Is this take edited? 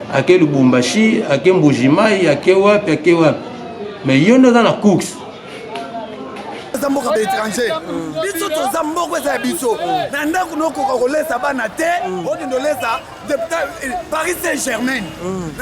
yes; 1 cut; at 6.8 s

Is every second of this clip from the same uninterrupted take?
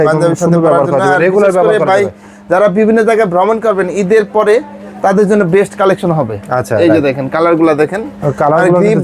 yes; 0 cuts

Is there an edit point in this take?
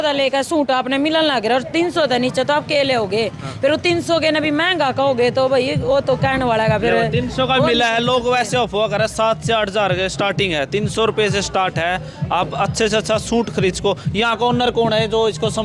no; 0 cuts

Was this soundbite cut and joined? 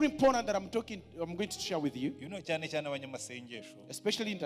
no; 0 cuts

